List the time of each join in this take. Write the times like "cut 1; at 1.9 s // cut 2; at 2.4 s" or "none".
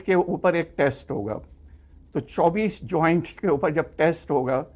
none